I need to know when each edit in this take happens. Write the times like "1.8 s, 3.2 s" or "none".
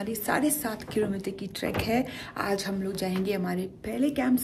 none